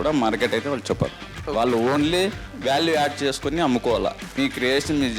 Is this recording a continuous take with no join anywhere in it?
no; 2 cuts; at 1.3 s, 4.2 s

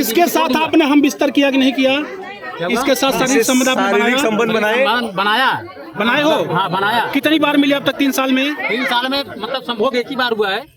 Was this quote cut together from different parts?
no; 0 cuts

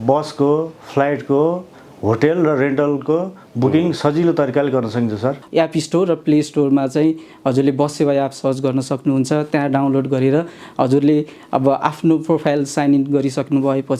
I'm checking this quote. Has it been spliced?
yes; 1 cut; at 5.4 s

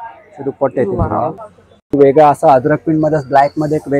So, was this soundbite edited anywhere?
yes; 1 cut; at 1.4 s

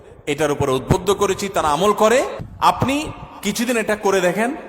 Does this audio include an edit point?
yes; 1 cut; at 2.4 s

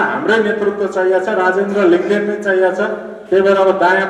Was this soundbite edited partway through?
no; 0 cuts

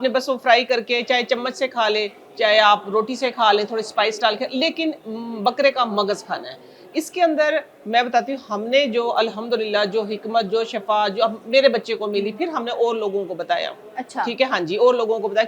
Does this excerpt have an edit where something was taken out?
no; 0 cuts

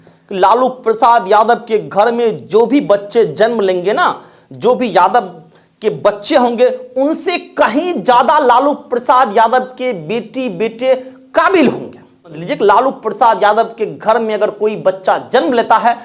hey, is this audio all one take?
no; 1 cut; at 12.4 s

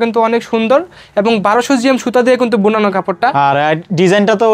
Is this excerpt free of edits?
yes; 0 cuts

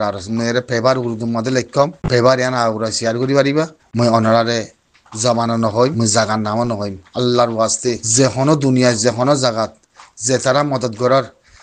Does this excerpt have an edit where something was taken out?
yes; 4 cuts; at 2.0 s, 3.8 s, 5.9 s, 8.0 s

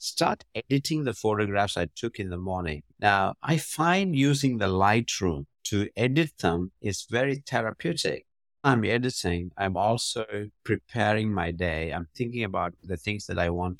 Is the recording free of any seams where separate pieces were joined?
no; 1 cut; at 8.7 s

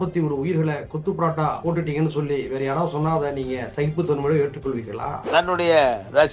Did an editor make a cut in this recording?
yes; 2 cuts; at 1.6 s, 5.2 s

